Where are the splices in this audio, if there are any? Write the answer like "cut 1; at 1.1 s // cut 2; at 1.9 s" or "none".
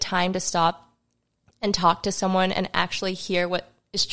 none